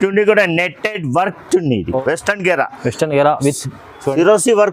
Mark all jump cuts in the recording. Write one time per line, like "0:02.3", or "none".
0:02.0